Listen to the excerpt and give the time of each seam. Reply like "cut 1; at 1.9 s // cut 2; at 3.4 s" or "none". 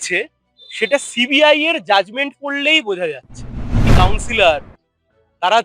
cut 1; at 3.8 s